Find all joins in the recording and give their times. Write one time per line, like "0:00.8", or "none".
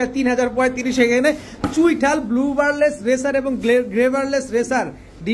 none